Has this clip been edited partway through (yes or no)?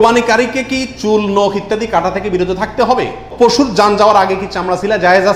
yes